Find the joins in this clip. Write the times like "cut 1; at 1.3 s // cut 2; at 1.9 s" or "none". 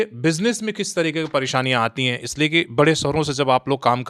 none